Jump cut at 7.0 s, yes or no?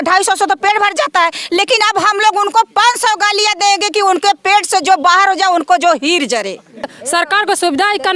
yes